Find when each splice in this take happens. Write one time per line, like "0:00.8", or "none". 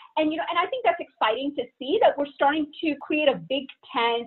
0:03.0